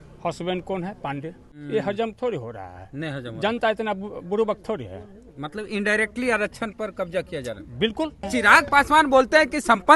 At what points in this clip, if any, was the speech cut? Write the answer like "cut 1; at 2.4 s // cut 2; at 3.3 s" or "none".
cut 1; at 1.5 s // cut 2; at 8.3 s